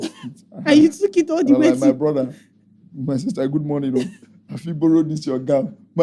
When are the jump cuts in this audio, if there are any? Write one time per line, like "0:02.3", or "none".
none